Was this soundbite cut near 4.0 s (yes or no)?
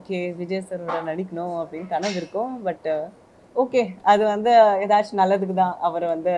no